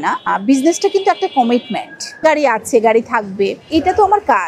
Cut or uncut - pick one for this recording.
cut